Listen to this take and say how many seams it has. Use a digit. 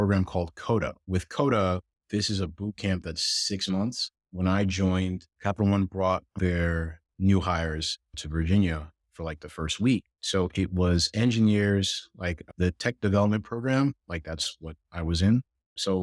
4